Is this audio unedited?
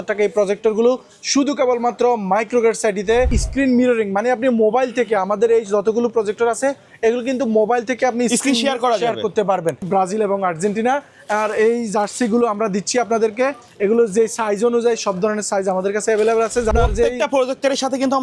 no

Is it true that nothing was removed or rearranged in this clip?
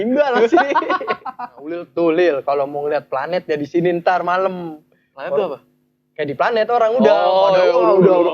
no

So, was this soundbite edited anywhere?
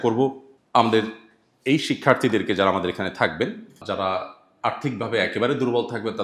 no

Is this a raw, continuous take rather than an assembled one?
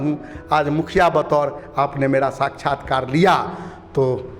yes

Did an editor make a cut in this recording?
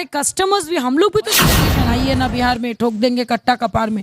yes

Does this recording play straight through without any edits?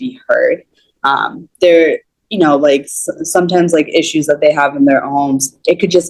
yes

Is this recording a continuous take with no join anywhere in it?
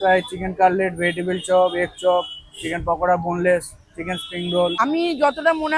no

